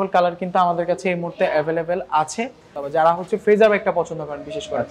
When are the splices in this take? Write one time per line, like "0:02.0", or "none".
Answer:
0:02.8